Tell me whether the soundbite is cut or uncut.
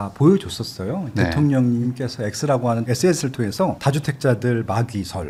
uncut